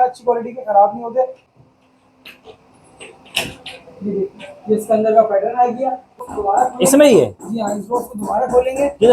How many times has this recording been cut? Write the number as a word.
two